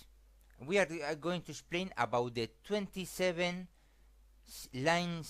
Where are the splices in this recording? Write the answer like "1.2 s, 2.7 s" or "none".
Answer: 3.7 s